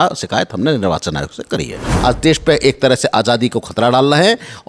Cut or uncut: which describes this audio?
cut